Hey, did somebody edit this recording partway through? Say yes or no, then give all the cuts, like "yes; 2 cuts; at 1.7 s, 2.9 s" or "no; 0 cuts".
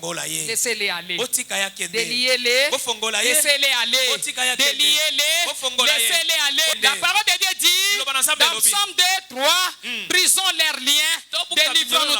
yes; 1 cut; at 6.8 s